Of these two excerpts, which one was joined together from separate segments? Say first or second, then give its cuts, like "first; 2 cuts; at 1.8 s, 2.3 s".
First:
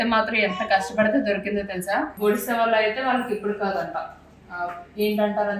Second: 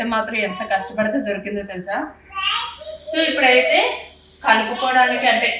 first; 1 cut; at 2.1 s